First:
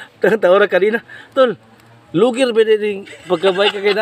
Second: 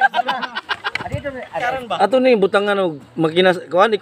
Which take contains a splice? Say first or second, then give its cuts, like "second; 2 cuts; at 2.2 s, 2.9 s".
second; 1 cut; at 1.6 s